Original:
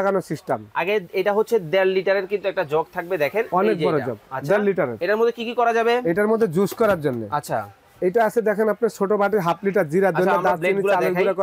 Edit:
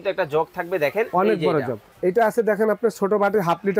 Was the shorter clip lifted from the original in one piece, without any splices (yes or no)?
no